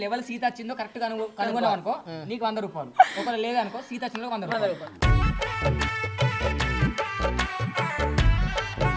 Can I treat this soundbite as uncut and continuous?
yes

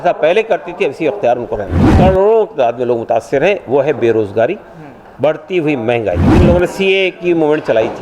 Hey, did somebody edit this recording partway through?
yes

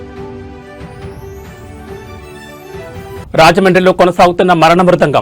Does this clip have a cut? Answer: yes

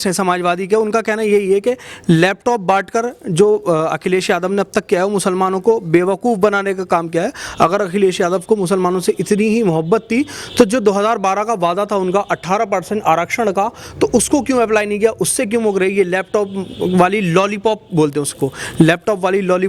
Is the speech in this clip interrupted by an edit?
no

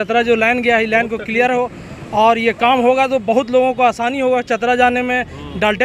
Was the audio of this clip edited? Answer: no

